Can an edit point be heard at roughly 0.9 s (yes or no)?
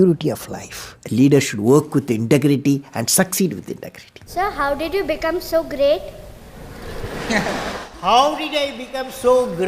yes